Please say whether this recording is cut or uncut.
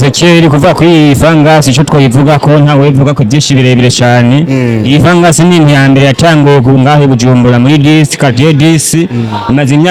uncut